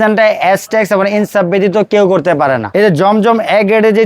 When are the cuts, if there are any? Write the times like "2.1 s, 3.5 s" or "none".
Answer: 2.6 s